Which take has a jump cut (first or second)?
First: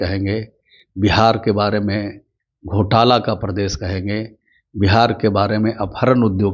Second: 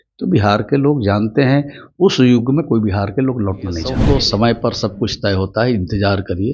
second